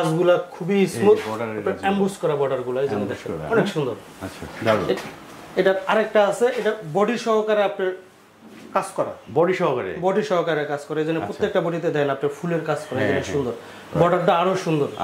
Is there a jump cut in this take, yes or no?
no